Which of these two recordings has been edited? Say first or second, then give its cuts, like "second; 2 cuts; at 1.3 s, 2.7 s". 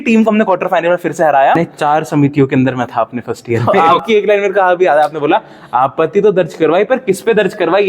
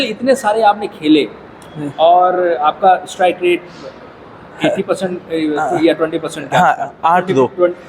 first; 2 cuts; at 1.6 s, 3.6 s